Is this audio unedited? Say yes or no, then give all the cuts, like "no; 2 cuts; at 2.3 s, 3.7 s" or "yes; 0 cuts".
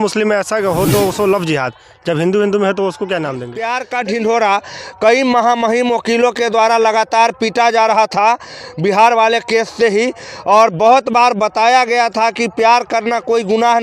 no; 1 cut; at 3.8 s